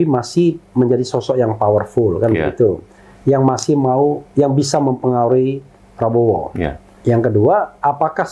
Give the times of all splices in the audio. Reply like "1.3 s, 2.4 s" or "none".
6.9 s